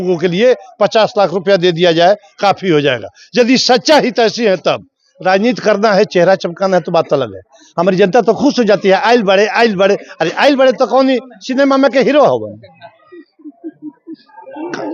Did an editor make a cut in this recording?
no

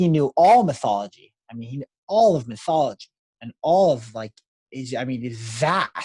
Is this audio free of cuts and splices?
yes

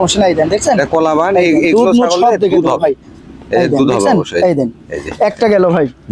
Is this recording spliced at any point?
no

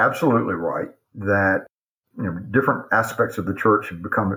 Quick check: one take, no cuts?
no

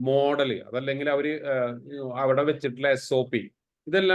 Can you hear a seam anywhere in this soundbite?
no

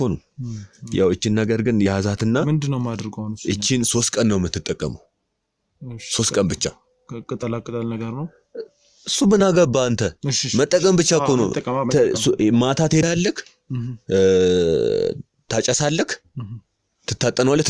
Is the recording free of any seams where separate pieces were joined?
yes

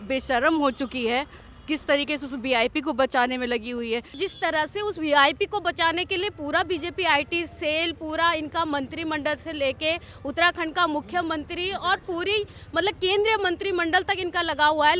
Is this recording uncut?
no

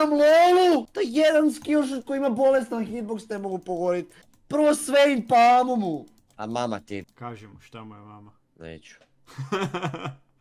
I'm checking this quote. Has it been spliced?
yes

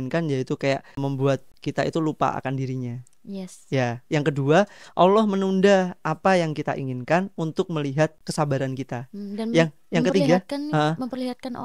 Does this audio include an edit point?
yes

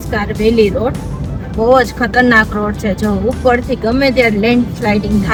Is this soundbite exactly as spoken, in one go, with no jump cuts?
yes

